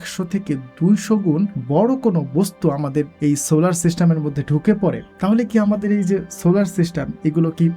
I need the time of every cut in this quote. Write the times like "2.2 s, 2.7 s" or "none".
1.6 s, 3.1 s, 5.1 s